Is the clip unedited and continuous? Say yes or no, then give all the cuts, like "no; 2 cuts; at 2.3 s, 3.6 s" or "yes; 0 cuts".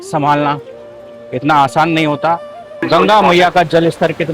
no; 1 cut; at 2.8 s